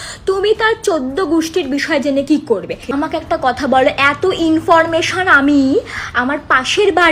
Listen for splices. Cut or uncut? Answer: cut